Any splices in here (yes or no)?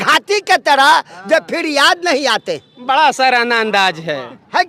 no